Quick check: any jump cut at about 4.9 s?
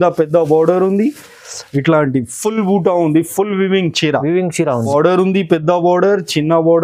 yes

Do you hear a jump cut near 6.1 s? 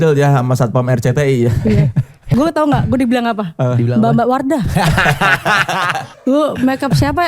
yes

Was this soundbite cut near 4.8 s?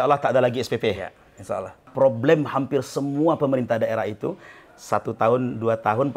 no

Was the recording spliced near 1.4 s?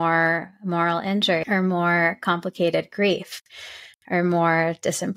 yes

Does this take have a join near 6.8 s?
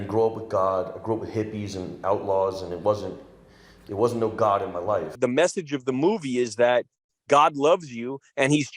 no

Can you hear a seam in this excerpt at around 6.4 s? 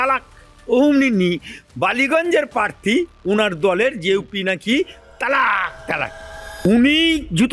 yes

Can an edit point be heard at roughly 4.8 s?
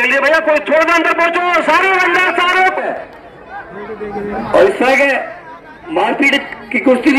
no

